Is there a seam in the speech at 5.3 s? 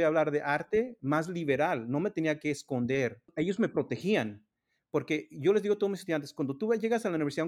no; 1 cut; at 3.3 s

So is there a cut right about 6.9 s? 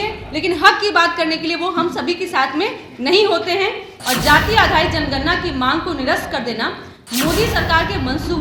no; 1 cut; at 3.9 s

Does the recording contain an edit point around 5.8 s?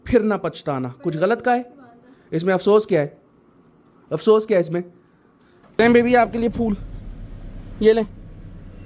yes; 1 cut; at 5.8 s

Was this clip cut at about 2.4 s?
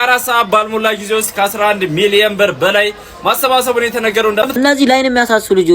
no; 1 cut; at 4.6 s

